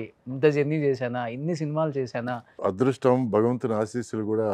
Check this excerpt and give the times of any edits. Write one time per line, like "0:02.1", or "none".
0:02.5